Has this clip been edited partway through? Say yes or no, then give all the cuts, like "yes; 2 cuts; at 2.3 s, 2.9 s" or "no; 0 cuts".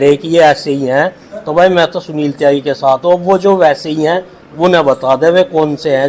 no; 0 cuts